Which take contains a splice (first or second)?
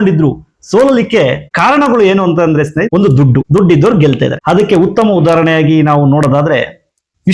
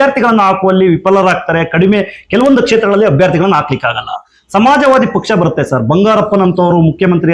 first